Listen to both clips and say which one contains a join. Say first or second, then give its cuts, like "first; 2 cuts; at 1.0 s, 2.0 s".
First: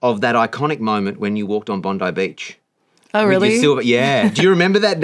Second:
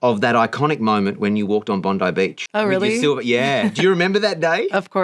second; 1 cut; at 2.4 s